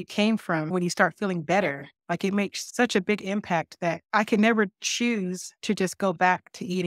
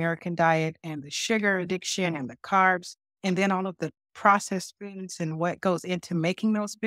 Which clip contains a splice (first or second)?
first